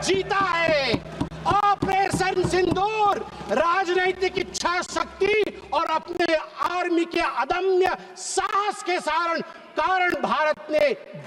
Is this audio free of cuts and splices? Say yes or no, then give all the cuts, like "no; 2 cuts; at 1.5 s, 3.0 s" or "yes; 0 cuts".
yes; 0 cuts